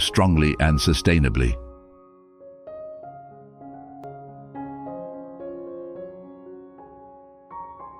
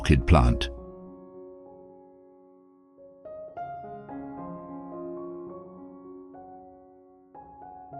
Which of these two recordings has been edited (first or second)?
first